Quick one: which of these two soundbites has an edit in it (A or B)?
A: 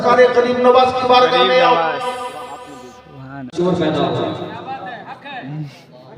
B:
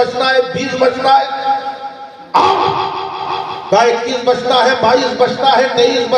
A